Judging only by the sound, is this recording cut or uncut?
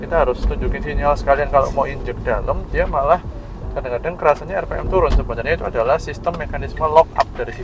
uncut